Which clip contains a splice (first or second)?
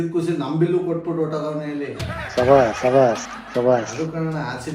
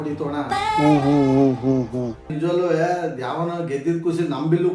second